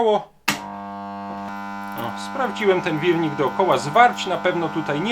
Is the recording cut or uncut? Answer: cut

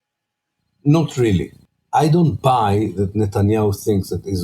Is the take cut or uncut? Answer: cut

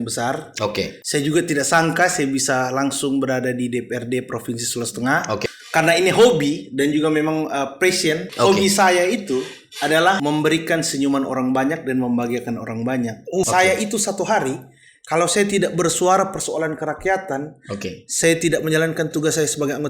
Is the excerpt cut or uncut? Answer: cut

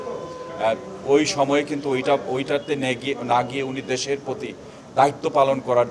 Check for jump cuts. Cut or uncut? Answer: uncut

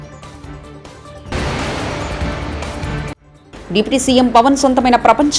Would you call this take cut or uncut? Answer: cut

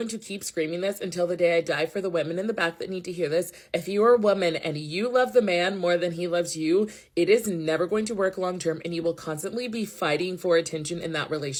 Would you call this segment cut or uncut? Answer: uncut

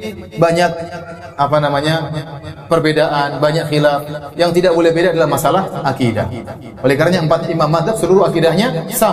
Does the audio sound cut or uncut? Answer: uncut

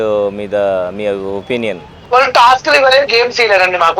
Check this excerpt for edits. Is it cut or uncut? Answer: cut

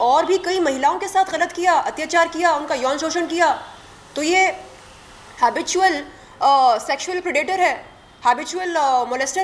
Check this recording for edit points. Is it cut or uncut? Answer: uncut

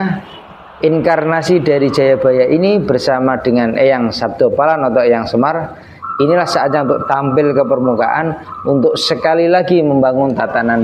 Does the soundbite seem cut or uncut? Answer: uncut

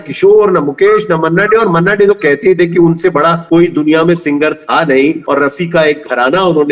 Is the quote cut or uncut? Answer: uncut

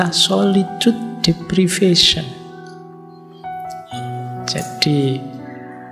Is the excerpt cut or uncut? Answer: cut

